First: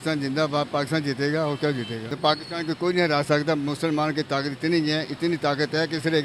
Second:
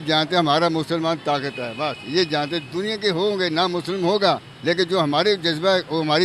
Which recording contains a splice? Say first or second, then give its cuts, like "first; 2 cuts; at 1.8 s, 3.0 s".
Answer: first; 1 cut; at 2.1 s